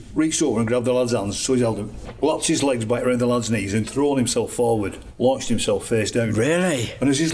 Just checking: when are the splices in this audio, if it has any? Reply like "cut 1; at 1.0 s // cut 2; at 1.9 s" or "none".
cut 1; at 2.0 s // cut 2; at 5.0 s